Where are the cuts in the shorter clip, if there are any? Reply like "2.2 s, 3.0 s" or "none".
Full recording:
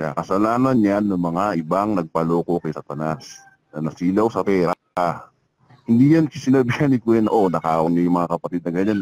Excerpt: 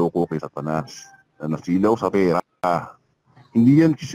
none